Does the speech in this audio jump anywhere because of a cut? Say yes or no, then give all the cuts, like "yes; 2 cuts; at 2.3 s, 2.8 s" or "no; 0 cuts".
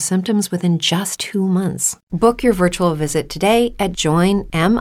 yes; 1 cut; at 1.1 s